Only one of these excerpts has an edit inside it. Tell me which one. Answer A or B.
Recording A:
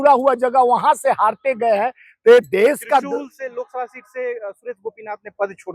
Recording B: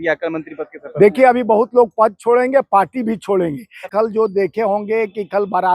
B